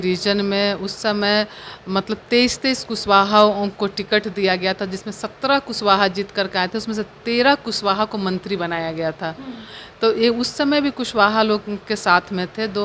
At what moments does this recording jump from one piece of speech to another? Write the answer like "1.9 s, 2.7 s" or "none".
none